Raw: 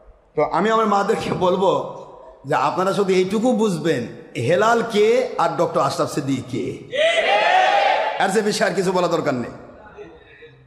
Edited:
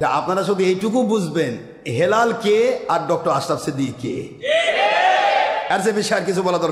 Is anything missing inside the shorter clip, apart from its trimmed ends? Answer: no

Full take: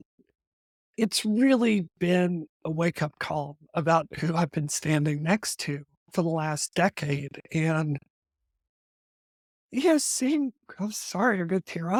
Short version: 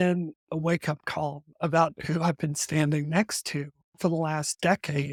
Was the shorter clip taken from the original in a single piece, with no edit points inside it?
yes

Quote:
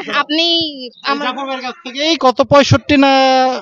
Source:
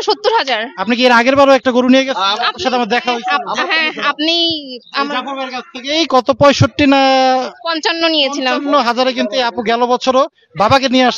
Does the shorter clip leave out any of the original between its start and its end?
no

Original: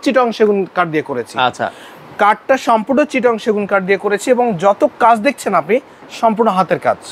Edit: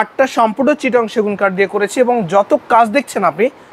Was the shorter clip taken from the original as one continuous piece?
yes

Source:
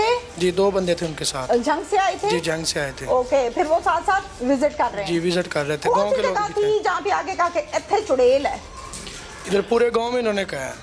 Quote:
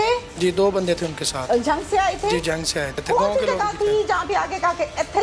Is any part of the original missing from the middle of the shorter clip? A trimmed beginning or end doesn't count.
yes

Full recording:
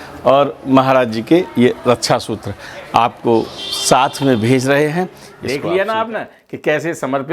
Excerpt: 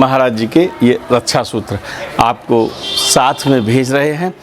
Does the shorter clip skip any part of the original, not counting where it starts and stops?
no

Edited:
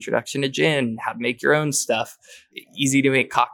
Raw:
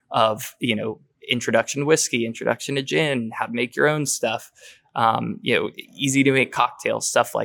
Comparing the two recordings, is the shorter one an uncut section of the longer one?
no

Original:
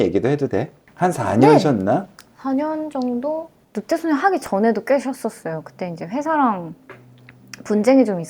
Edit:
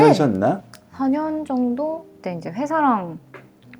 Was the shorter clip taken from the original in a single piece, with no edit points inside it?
no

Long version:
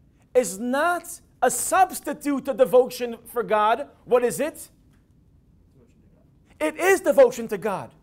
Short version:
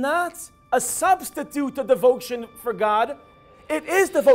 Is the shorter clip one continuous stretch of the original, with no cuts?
no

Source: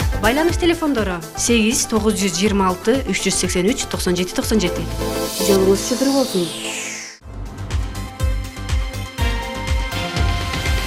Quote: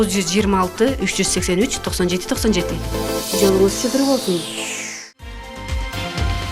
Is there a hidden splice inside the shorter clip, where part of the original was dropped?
yes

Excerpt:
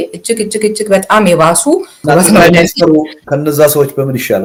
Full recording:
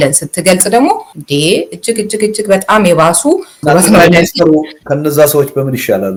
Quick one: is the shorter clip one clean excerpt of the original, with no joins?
yes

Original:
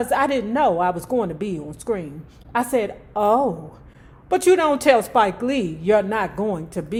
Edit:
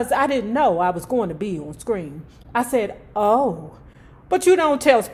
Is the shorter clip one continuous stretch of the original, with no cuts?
yes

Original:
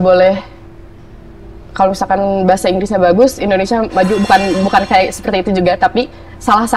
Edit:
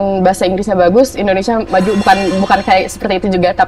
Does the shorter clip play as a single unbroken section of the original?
yes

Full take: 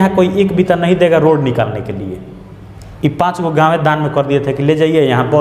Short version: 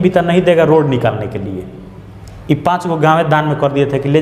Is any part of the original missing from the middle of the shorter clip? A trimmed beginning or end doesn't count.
no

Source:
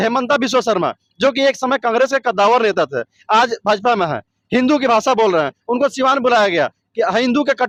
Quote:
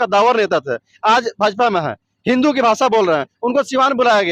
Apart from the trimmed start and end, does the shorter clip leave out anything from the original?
no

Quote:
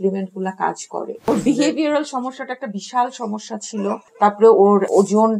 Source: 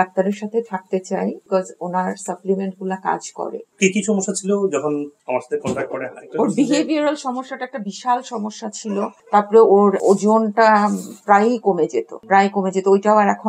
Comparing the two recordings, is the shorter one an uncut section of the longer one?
no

